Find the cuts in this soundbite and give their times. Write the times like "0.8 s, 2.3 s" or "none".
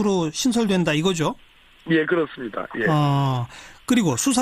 1.4 s